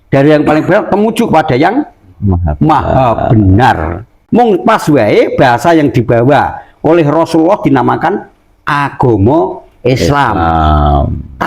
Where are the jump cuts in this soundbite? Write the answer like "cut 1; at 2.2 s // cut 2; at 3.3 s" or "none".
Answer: cut 1; at 4.2 s

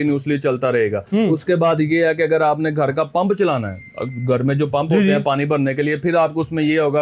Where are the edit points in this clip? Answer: none

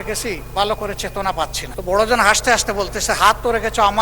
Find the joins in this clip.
cut 1; at 1.7 s

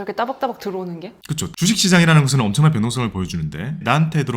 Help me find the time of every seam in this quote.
cut 1; at 1.5 s

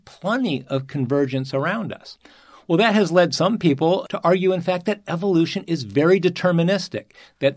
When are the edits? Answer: cut 1; at 4.1 s

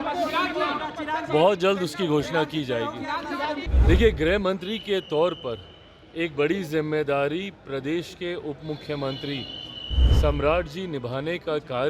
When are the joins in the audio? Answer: cut 1; at 3.7 s

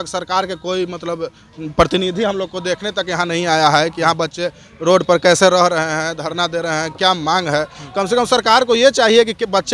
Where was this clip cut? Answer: none

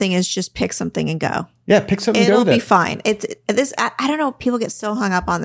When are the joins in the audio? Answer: none

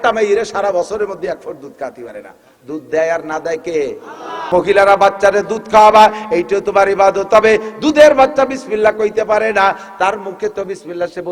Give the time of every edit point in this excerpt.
cut 1; at 4.4 s

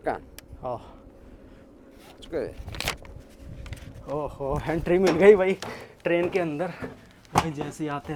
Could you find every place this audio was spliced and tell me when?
none

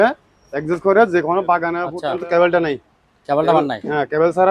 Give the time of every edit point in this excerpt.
cut 1; at 1.9 s

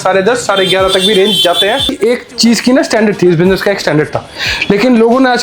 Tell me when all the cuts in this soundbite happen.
cut 1; at 2.0 s

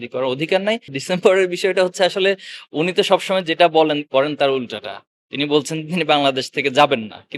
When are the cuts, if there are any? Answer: cut 1; at 0.9 s

